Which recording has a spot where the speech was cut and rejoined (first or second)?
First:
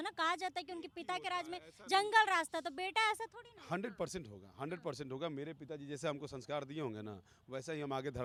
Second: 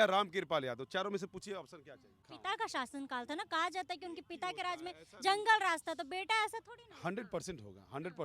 second